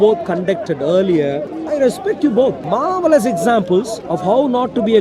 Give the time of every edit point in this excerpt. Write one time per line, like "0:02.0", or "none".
0:01.5
0:02.6
0:04.0

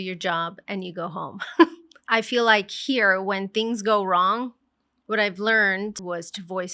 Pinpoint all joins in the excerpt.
0:02.0
0:06.0

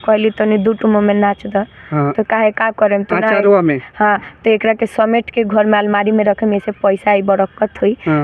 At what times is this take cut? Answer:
none

